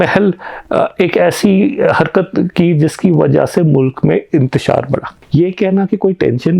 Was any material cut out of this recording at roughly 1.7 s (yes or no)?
no